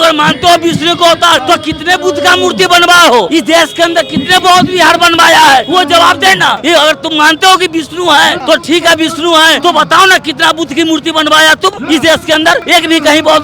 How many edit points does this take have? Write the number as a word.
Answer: eight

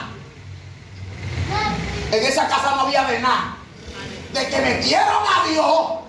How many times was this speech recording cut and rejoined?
zero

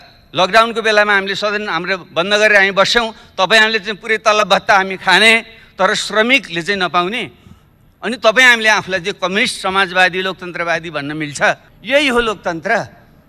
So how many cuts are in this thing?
one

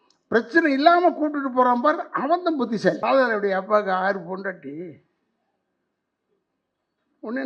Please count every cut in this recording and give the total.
one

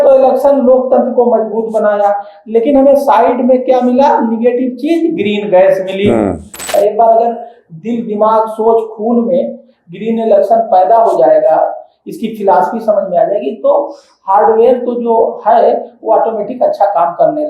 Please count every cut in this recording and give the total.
one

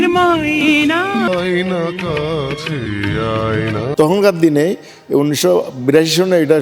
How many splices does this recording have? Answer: one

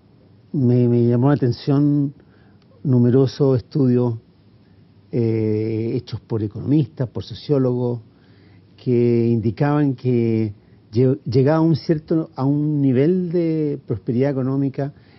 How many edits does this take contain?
one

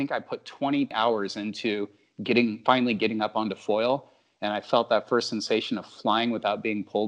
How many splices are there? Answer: one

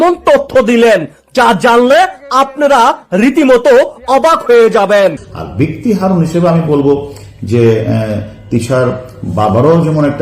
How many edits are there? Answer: one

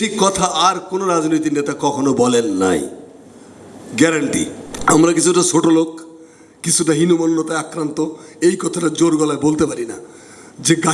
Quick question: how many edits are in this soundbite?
one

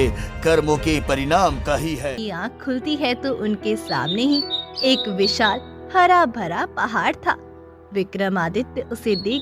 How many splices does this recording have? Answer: one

